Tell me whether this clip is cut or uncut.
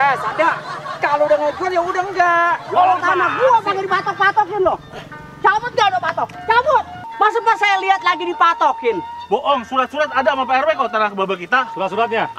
cut